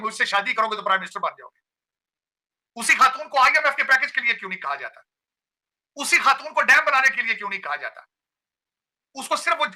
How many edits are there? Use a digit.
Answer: 0